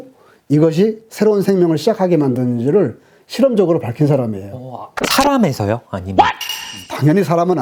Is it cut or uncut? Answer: uncut